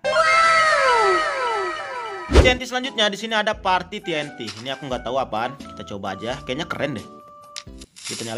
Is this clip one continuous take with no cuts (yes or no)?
no